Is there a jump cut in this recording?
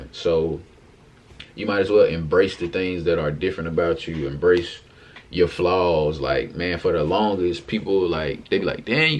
no; 0 cuts

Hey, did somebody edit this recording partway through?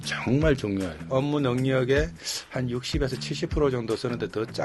yes; 1 cut; at 1.0 s

